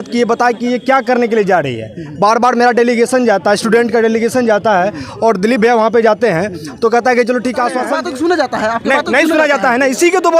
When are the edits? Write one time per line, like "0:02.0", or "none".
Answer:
0:07.8